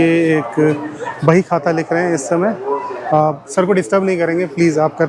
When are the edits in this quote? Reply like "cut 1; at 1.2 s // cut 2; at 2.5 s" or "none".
none